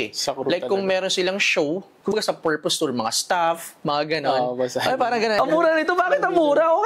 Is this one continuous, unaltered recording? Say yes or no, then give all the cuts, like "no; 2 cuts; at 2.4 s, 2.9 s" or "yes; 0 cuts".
no; 2 cuts; at 2.1 s, 5.4 s